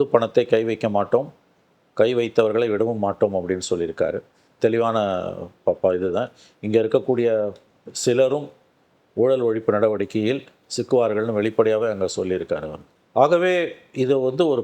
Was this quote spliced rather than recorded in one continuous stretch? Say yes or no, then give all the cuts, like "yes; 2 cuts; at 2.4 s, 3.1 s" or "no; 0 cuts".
no; 0 cuts